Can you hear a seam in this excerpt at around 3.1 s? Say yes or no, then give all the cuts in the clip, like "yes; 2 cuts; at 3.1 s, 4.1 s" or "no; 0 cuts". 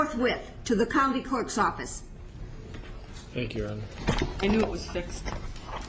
yes; 1 cut; at 3.1 s